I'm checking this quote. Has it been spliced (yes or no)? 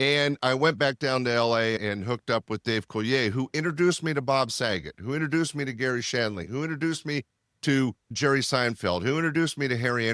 no